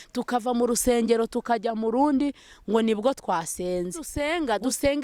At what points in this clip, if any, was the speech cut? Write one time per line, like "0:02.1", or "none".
0:04.1